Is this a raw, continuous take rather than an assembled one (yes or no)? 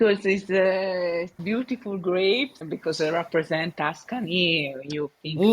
no